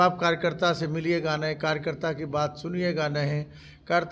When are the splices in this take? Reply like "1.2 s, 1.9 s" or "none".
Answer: none